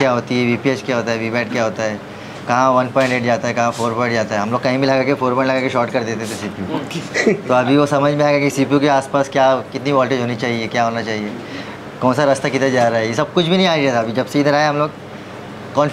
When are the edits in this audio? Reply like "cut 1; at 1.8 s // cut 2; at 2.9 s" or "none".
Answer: none

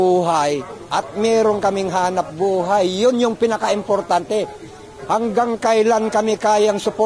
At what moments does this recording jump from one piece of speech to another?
none

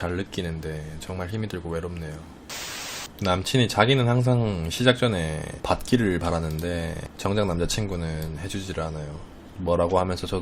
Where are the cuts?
cut 1; at 2.9 s // cut 2; at 7.0 s

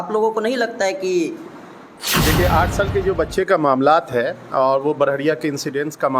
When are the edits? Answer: cut 1; at 2.2 s

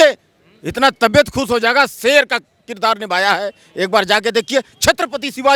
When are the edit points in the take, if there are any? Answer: none

